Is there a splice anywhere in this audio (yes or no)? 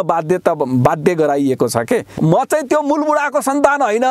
yes